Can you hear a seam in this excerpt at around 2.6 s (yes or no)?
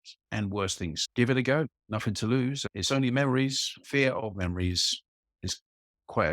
yes